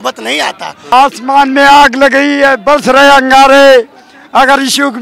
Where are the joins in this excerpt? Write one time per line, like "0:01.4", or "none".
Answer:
0:00.9

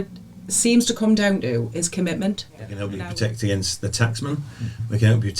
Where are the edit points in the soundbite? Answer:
0:02.8

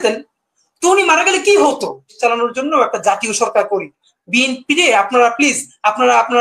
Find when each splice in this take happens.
0:02.1

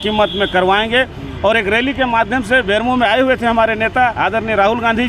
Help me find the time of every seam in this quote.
none

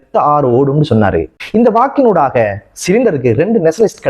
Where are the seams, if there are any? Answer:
0:01.4

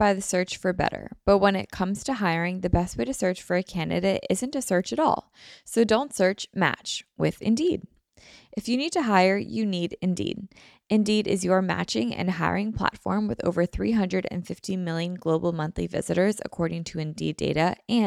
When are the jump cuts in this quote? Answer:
none

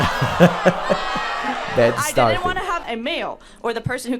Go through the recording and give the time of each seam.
0:02.8

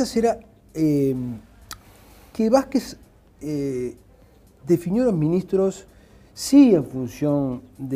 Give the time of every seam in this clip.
none

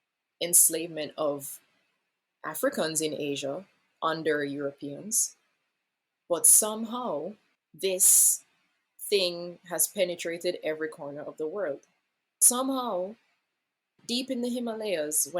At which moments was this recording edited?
0:07.5
0:12.4

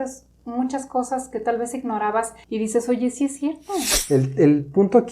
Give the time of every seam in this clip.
0:02.4
0:03.9

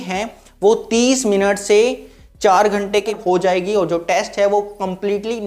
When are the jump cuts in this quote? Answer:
0:03.1

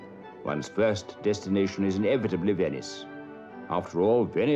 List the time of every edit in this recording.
0:01.1

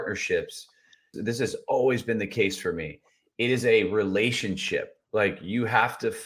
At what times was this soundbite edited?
0:01.1

